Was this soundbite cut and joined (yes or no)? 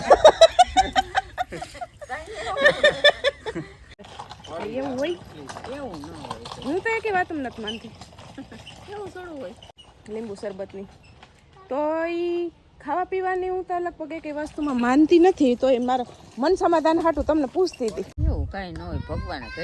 yes